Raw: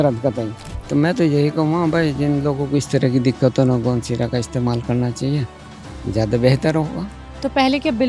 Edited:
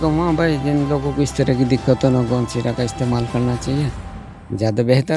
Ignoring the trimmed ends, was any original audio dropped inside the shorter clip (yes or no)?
no